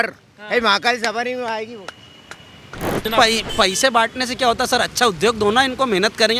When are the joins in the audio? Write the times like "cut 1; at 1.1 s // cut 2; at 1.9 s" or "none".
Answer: cut 1; at 3.0 s